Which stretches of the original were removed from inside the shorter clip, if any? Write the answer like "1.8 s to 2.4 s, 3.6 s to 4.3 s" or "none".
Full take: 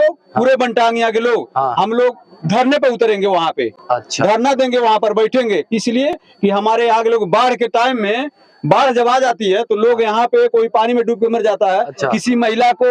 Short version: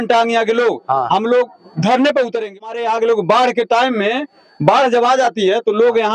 3.3 s to 6.6 s